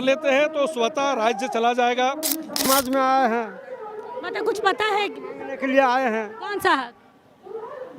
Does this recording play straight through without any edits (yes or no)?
no